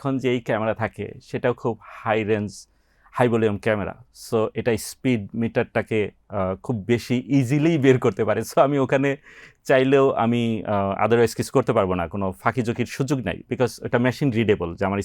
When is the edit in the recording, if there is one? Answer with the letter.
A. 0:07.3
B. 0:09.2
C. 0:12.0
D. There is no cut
D